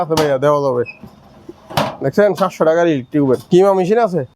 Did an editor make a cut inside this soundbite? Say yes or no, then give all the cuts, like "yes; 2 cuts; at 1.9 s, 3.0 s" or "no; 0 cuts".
yes; 1 cut; at 3.4 s